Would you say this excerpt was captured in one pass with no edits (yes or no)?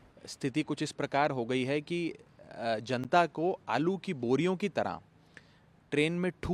yes